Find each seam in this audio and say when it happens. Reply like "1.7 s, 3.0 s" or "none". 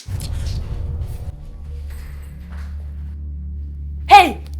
1.3 s